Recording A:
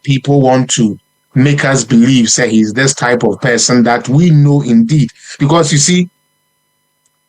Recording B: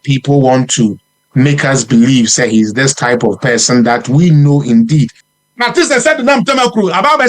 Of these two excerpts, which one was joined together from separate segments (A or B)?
B